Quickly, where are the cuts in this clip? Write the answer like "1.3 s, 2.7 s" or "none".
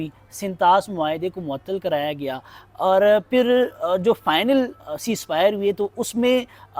none